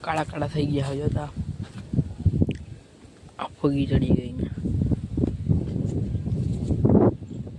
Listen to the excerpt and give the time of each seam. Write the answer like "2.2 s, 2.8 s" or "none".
none